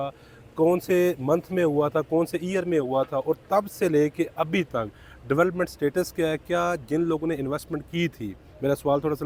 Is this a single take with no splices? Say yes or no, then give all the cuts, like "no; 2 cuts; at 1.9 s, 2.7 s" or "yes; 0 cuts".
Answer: yes; 0 cuts